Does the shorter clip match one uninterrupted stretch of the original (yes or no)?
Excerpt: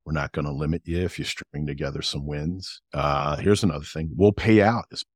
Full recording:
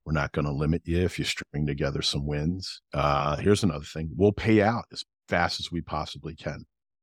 yes